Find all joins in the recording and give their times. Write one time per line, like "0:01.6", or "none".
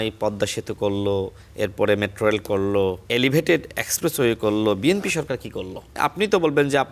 0:01.4
0:03.0
0:06.0